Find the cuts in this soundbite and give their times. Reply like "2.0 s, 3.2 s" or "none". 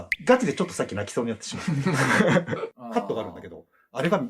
2.7 s